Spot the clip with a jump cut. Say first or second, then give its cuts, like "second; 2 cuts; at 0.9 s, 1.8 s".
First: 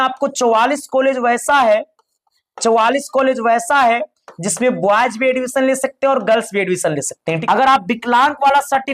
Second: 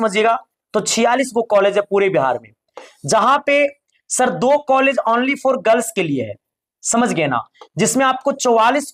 first; 1 cut; at 7.4 s